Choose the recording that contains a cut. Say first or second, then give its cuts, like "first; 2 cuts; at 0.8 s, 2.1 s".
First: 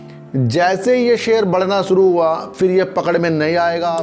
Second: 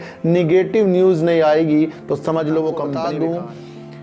second; 1 cut; at 2.9 s